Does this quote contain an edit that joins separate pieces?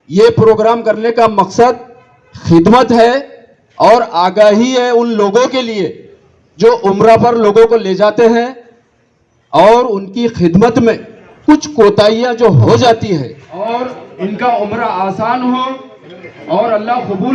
yes; 1 cut; at 13.6 s

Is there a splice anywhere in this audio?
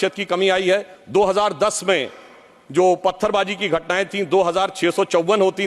yes; 1 cut; at 1.0 s

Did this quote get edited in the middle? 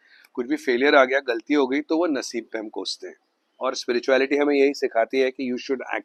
no; 0 cuts

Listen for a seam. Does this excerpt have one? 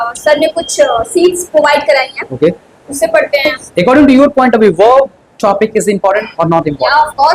yes; 1 cut; at 3.5 s

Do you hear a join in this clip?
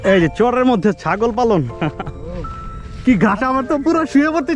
no; 0 cuts

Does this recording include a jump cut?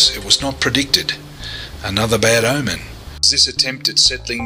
yes; 1 cut; at 3.4 s

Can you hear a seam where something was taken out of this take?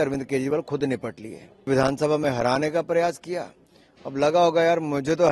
yes; 1 cut; at 1.7 s

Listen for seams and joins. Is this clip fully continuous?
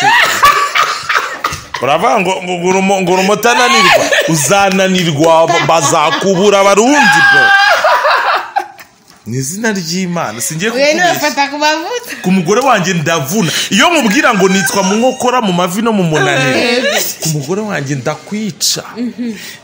yes; 0 cuts

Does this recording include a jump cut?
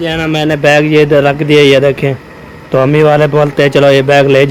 no; 0 cuts

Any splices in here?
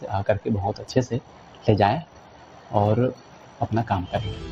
no; 0 cuts

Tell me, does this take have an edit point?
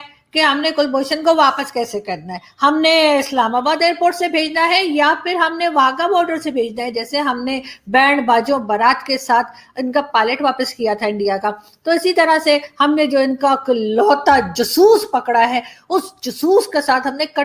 no; 0 cuts

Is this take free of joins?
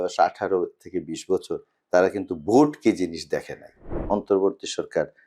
no; 1 cut; at 4.0 s

